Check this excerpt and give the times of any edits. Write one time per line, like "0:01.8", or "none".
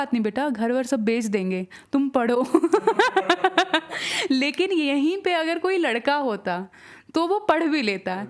none